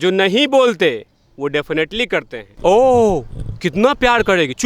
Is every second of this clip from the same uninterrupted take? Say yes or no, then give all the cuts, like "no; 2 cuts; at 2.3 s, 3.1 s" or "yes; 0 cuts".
no; 1 cut; at 2.4 s